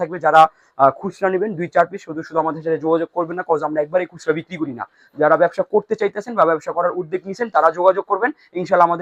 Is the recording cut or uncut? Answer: uncut